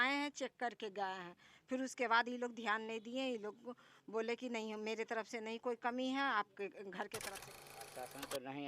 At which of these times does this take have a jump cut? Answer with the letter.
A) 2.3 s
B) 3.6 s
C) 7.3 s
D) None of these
C